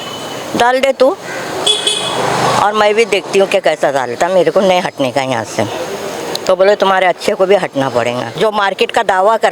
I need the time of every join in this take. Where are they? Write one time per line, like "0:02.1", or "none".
0:08.3